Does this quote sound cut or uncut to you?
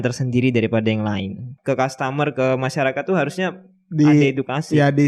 cut